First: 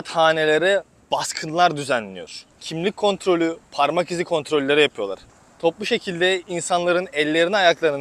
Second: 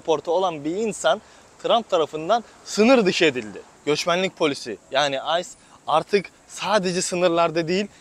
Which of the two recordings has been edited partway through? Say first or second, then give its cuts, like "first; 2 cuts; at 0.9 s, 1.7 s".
second; 1 cut; at 3.7 s